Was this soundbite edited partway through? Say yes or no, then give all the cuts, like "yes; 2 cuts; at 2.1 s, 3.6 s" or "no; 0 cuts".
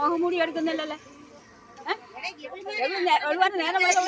no; 0 cuts